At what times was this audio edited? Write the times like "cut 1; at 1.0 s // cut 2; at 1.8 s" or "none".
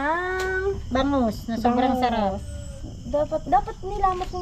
none